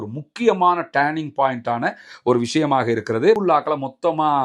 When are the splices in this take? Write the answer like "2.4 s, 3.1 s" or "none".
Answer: 3.4 s

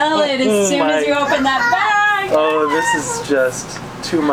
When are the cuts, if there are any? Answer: none

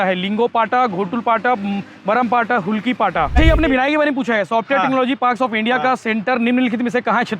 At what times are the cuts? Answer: 3.4 s

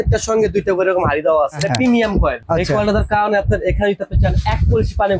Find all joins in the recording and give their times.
1.6 s, 2.4 s

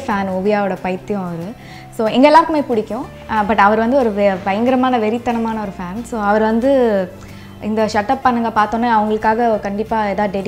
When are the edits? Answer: none

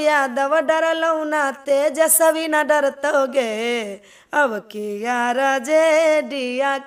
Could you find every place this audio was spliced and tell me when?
none

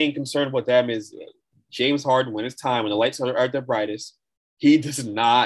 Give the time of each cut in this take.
none

